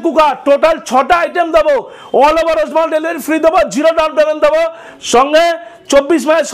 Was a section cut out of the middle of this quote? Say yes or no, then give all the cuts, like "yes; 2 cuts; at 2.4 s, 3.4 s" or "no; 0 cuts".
no; 0 cuts